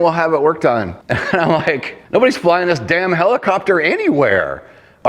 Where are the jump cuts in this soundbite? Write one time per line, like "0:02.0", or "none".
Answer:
0:01.0
0:01.9